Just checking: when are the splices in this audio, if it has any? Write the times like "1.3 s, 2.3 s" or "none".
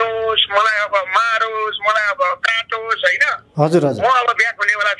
none